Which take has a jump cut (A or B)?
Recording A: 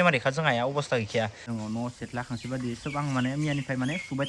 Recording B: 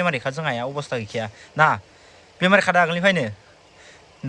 A